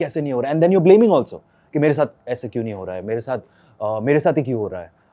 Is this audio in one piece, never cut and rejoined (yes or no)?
yes